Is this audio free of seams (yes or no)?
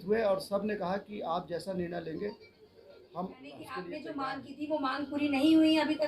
no